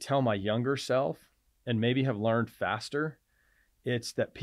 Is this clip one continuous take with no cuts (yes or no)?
yes